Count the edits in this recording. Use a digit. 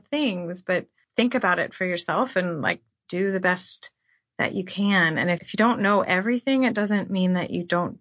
3